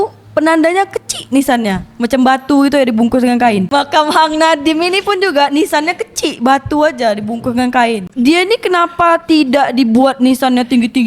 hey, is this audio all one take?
no; 2 cuts; at 3.7 s, 8.1 s

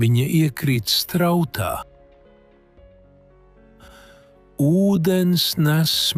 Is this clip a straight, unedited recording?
yes; 0 cuts

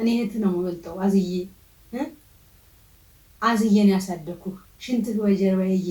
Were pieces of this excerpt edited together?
no; 0 cuts

